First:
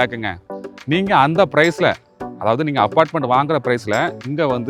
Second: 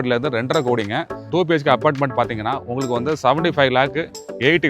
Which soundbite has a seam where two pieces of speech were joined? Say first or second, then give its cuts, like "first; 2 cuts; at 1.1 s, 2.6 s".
second; 1 cut; at 1.3 s